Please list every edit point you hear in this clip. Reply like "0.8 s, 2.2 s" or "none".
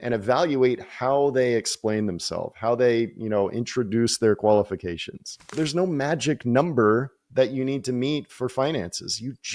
5.5 s